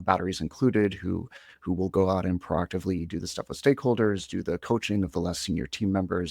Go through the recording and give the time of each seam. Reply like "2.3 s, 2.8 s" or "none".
none